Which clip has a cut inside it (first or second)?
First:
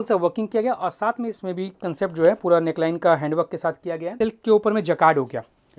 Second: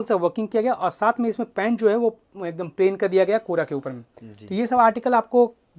first